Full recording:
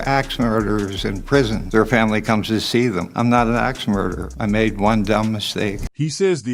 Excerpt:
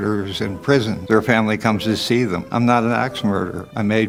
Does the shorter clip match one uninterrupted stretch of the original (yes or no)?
yes